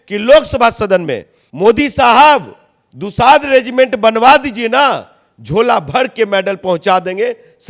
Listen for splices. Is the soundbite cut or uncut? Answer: cut